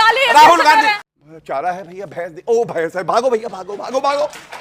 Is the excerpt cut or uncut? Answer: cut